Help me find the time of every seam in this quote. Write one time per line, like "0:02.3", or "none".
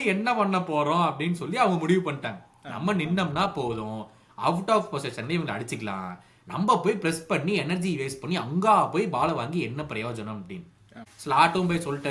0:11.0